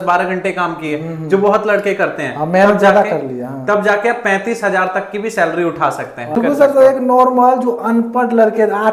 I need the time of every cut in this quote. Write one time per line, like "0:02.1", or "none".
0:06.4